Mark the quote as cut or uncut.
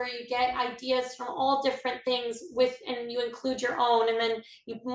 uncut